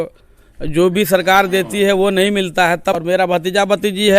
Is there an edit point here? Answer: yes; 1 cut; at 3.0 s

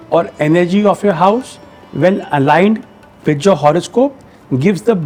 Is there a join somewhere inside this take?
no; 0 cuts

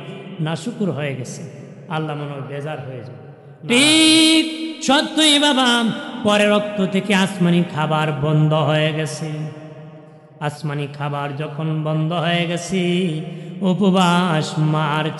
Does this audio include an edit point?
yes; 1 cut; at 3.4 s

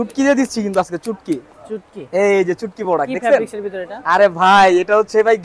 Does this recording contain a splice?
no; 0 cuts

